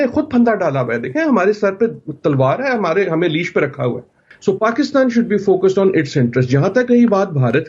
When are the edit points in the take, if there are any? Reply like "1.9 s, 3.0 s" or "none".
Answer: 4.3 s